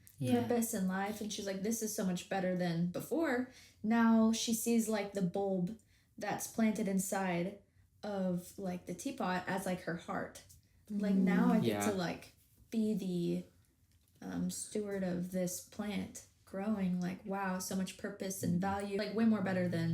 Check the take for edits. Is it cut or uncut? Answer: cut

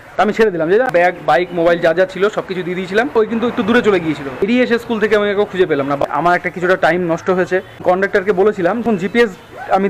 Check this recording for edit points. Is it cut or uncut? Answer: cut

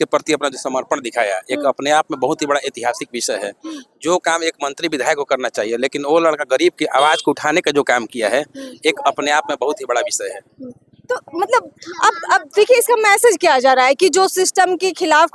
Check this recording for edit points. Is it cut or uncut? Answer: uncut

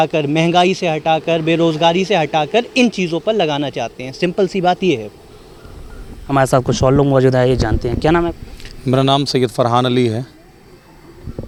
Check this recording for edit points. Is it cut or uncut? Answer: uncut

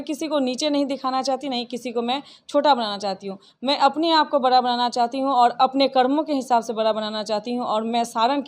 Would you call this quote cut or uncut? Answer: uncut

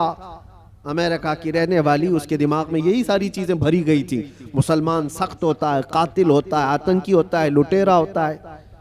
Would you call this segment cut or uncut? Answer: uncut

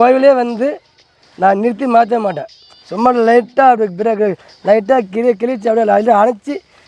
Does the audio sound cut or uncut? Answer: uncut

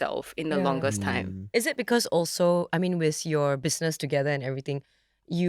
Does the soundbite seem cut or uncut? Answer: uncut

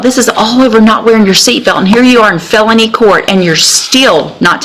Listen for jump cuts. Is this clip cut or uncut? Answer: uncut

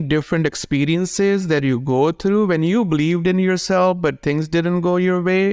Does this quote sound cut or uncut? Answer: uncut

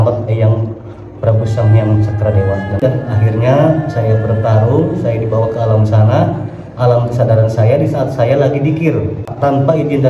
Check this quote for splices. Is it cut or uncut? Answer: cut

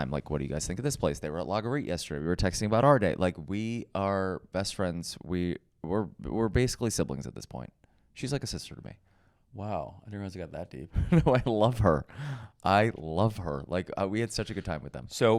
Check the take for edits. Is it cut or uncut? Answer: uncut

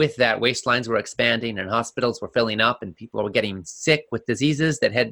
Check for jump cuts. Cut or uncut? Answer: uncut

